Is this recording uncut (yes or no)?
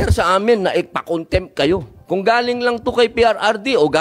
no